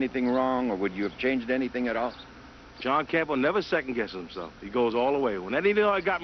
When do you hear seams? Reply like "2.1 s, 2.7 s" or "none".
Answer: 4.4 s